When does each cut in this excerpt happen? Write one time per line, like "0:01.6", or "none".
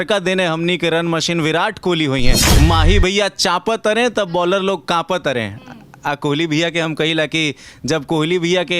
0:02.4